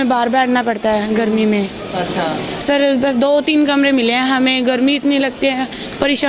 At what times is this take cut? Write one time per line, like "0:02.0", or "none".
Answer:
none